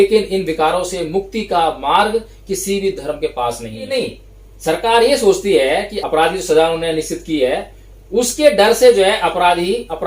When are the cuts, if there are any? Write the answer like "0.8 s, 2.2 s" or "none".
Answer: 3.9 s, 5.9 s